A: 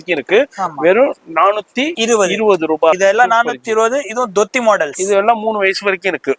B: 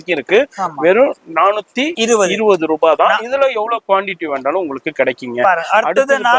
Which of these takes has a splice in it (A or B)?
A